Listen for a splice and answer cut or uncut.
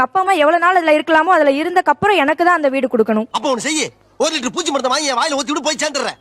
uncut